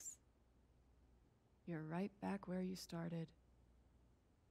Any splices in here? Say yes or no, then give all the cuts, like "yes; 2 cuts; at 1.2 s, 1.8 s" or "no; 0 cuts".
yes; 1 cut; at 3.5 s